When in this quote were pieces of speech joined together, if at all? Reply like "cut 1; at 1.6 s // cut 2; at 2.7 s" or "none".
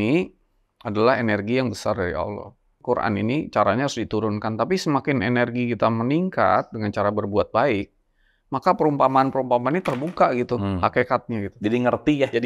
cut 1; at 2.7 s